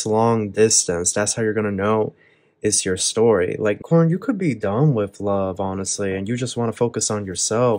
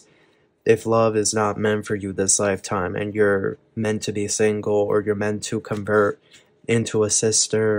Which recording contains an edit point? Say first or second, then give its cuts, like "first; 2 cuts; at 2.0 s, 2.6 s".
first; 1 cut; at 3.8 s